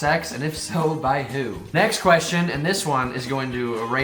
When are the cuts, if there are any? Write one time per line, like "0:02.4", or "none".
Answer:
0:01.6